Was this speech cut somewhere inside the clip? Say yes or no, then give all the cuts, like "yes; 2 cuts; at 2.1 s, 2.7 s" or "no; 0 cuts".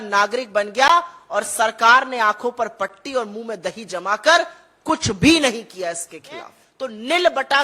yes; 1 cut; at 6.6 s